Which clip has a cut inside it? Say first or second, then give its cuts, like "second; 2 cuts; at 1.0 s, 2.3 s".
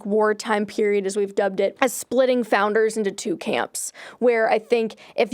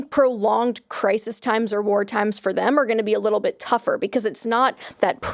first; 1 cut; at 1.7 s